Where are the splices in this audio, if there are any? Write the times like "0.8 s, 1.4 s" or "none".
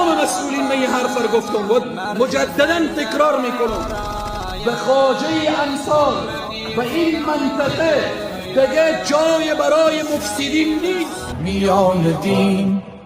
11.2 s